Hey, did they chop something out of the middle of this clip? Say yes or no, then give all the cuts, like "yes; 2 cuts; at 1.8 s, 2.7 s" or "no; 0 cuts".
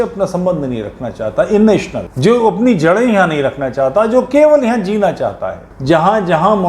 yes; 2 cuts; at 2.0 s, 5.7 s